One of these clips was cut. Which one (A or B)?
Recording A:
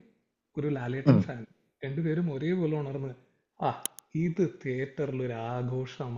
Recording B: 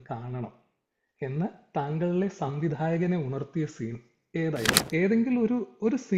B